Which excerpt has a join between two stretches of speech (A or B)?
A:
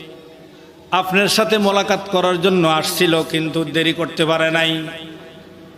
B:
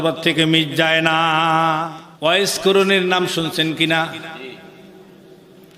B